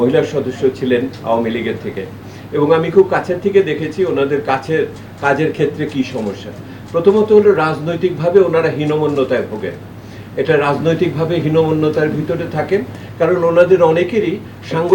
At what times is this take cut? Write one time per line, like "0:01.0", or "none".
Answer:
none